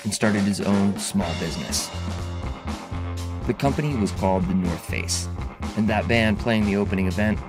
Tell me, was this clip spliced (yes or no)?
no